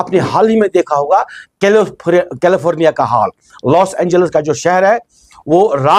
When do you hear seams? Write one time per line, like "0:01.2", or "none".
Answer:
none

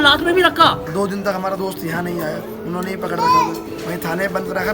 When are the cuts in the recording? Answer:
0:00.8
0:03.7

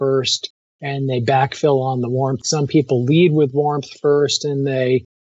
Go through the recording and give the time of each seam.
0:02.4

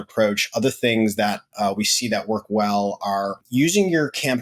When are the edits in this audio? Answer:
0:03.4

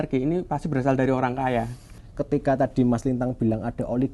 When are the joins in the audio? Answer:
0:01.9

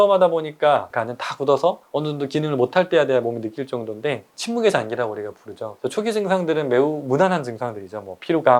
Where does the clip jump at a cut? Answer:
0:00.9
0:01.8
0:04.3
0:05.7

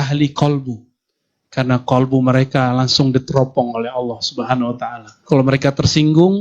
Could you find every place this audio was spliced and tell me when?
0:05.1

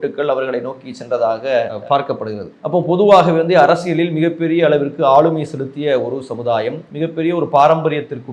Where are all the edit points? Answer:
0:06.8

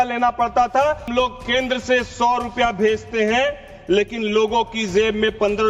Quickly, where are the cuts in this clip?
0:01.1

